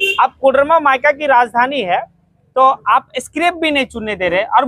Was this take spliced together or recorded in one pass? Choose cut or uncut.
uncut